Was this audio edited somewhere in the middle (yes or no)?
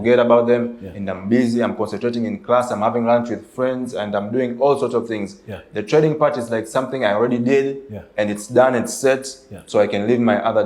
no